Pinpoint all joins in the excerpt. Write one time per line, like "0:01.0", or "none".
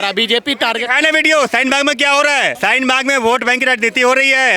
0:02.5